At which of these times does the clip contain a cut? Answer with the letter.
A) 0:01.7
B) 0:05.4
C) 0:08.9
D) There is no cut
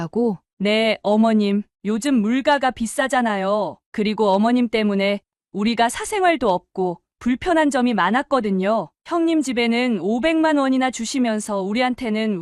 D